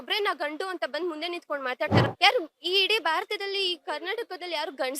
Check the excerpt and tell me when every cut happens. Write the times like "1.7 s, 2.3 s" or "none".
2.0 s